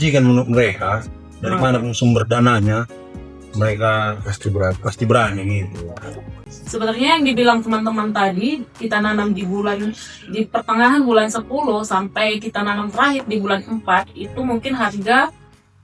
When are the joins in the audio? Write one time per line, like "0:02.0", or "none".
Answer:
0:06.4